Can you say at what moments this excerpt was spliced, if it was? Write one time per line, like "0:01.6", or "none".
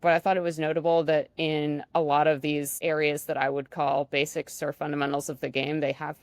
0:02.7